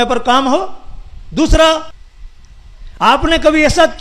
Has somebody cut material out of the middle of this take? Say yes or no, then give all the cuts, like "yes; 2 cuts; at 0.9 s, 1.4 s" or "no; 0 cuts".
yes; 1 cut; at 2.0 s